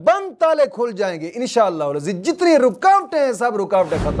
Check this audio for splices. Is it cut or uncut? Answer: uncut